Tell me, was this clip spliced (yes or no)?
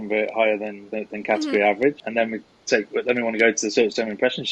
yes